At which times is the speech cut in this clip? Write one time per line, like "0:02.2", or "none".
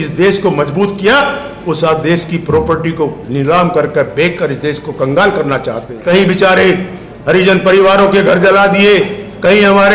0:06.0